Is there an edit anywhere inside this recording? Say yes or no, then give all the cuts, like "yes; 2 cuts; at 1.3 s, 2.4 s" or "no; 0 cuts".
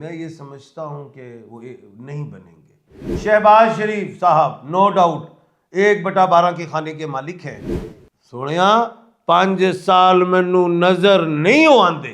yes; 1 cut; at 3.2 s